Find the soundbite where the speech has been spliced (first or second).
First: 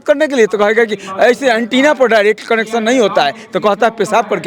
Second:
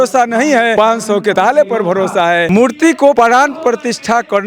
second